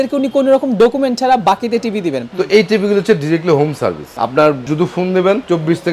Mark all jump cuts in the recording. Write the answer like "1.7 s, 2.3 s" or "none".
2.2 s, 4.1 s